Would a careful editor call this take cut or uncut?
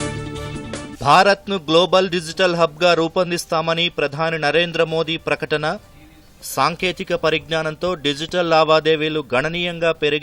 uncut